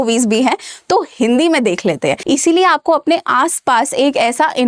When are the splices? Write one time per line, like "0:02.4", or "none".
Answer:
0:02.2